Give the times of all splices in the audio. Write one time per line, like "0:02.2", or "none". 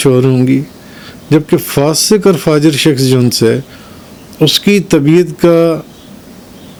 none